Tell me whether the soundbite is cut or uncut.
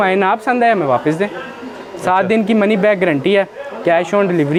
uncut